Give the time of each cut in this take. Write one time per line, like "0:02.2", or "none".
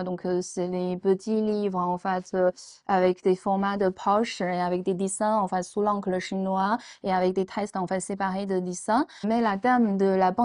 0:09.1